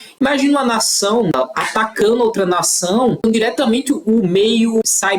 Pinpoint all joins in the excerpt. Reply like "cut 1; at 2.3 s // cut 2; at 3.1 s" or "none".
cut 1; at 1.3 s // cut 2; at 3.2 s